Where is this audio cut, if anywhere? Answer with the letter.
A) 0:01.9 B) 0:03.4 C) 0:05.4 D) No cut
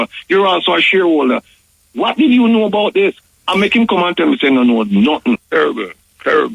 C